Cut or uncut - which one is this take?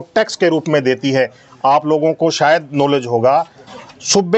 uncut